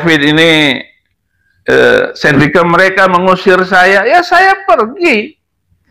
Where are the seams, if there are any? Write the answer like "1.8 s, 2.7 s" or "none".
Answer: 2.4 s